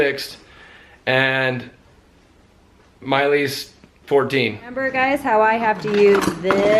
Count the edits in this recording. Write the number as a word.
one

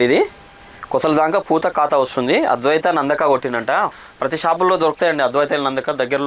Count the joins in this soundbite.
one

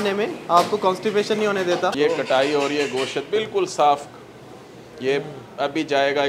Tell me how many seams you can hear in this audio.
one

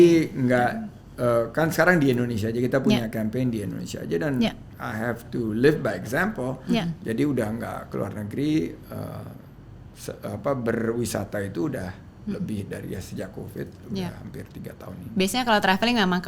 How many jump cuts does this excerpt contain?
zero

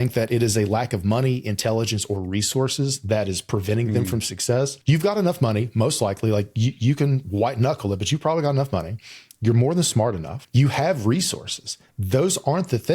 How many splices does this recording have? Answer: two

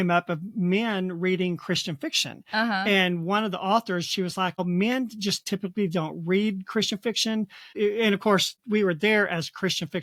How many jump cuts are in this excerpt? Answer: zero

